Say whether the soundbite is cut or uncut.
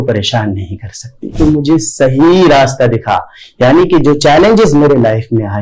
cut